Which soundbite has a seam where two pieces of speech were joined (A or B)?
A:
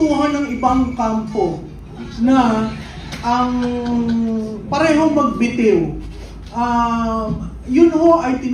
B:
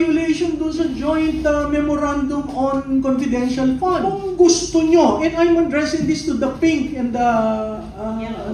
B